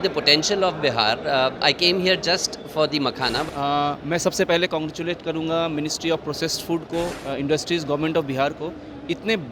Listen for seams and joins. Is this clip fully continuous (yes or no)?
no